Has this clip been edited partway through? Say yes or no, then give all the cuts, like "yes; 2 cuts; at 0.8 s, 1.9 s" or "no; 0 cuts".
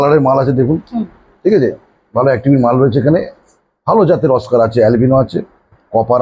no; 0 cuts